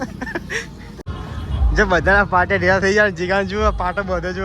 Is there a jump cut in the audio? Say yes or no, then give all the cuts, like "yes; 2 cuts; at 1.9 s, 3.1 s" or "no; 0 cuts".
yes; 1 cut; at 1.1 s